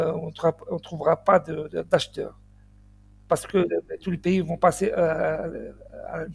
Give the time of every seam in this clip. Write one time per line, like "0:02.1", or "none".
none